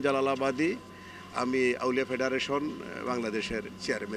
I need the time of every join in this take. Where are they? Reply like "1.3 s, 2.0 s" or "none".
none

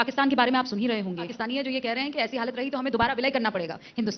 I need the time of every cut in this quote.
1.4 s

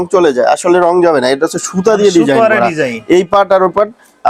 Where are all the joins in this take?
none

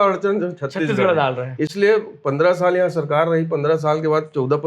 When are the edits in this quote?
none

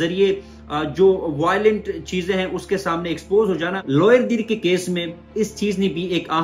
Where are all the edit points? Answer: 3.8 s

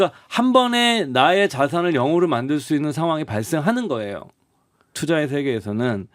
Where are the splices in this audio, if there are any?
4.9 s

